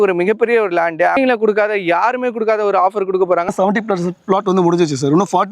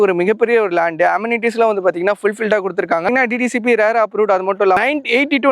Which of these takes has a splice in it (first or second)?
first